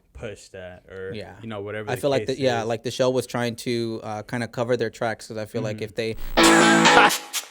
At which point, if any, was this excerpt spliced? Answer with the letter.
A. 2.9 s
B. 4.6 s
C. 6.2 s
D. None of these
C